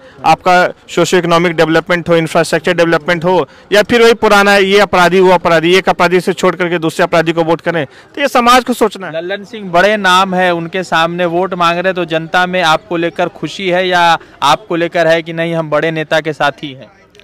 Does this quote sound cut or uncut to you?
cut